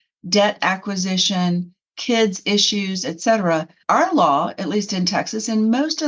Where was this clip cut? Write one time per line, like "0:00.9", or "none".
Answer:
0:03.8